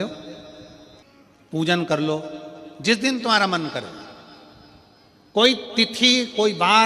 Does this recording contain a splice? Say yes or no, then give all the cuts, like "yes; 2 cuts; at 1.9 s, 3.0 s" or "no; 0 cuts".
yes; 1 cut; at 1.0 s